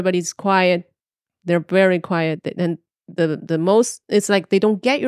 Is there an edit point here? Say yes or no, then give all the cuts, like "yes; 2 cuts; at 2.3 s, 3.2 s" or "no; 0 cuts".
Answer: no; 0 cuts